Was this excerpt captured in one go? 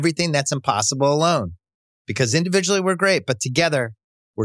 yes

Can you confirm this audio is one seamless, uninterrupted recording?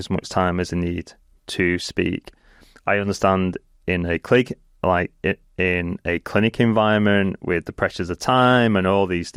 yes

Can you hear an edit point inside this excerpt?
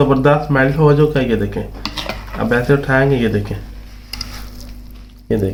no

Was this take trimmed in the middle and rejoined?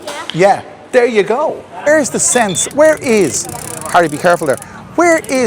yes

